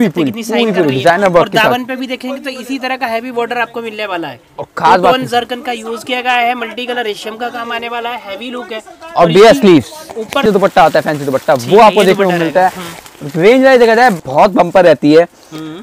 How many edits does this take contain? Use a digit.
2